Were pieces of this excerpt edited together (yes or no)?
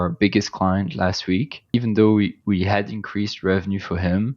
yes